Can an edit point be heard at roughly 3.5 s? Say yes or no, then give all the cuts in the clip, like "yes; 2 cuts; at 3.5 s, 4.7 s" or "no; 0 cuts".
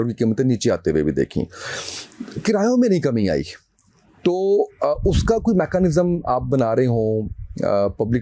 no; 0 cuts